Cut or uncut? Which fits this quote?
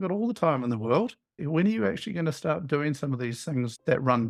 uncut